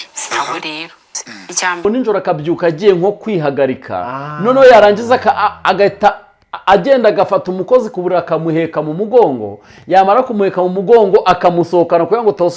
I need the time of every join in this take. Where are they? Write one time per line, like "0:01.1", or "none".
0:01.8